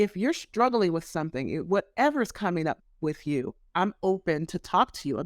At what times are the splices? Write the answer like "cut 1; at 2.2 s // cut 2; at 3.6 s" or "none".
cut 1; at 3.6 s

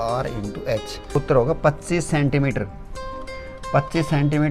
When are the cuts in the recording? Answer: cut 1; at 1.1 s

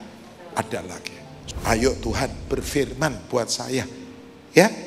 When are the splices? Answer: cut 1; at 1.4 s

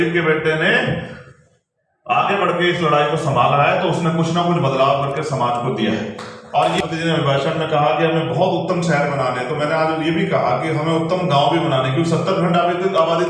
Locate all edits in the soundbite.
cut 1; at 6.8 s

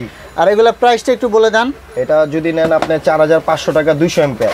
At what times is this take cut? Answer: none

